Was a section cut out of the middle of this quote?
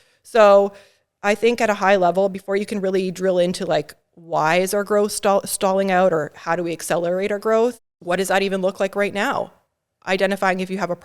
yes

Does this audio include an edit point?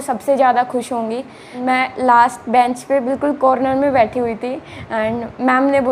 yes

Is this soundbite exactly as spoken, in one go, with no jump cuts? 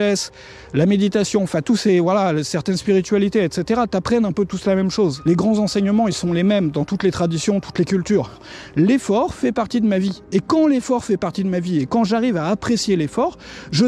no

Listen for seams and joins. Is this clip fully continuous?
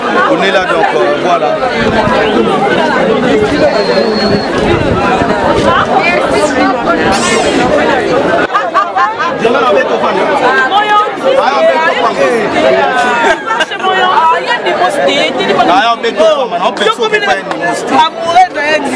yes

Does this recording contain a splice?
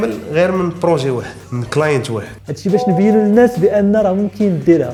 no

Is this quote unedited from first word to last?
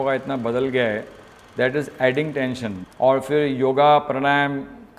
no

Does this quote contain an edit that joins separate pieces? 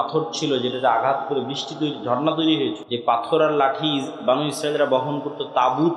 yes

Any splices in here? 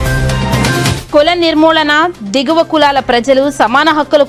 yes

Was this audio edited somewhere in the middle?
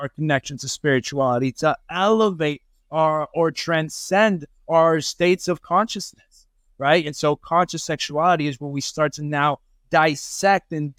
no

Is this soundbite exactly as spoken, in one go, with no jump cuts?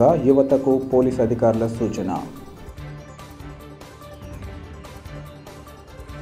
yes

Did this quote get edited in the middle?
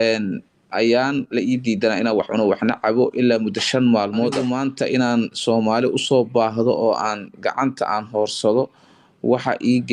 yes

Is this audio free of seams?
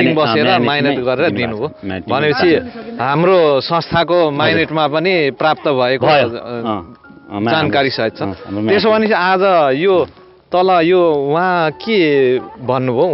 yes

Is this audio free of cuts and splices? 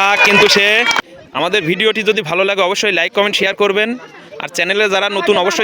no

